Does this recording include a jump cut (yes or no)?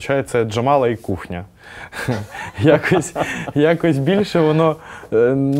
no